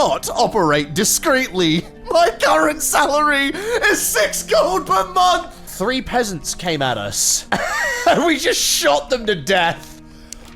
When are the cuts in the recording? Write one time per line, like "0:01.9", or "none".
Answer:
0:05.5